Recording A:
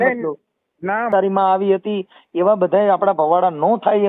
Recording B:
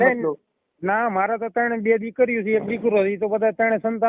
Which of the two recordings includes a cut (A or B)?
A